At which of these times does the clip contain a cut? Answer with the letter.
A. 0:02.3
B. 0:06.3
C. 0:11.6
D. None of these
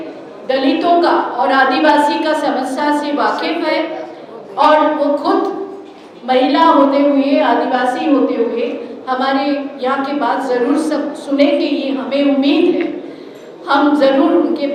D